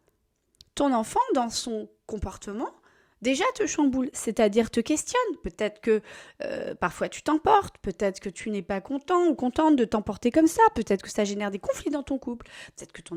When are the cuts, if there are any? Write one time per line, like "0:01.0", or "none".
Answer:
none